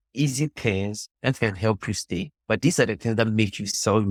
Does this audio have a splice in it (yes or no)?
no